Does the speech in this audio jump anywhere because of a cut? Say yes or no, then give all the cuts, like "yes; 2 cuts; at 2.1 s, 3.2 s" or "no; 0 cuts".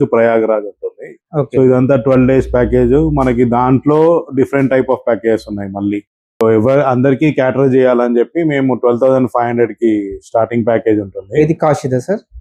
no; 0 cuts